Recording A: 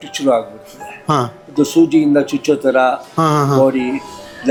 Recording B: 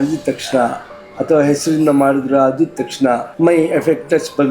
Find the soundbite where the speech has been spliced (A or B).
B